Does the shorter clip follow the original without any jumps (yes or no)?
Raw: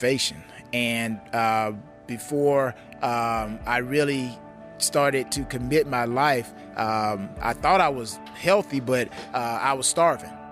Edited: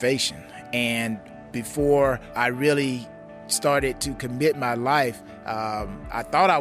no